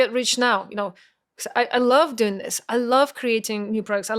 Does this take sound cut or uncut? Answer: uncut